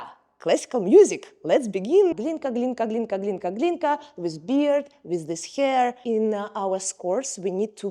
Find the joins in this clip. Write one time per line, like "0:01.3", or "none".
0:02.1
0:06.0